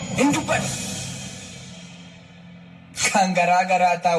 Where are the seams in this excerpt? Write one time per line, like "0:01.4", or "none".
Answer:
0:01.6